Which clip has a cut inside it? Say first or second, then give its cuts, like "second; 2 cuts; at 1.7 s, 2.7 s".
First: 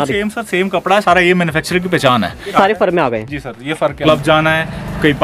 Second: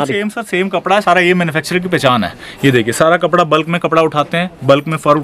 first; 2 cuts; at 2.5 s, 4.0 s